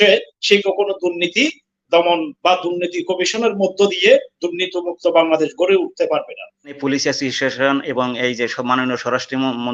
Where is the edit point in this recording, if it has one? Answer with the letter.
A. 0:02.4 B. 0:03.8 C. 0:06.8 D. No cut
C